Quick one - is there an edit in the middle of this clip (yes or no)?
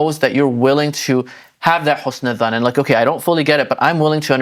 no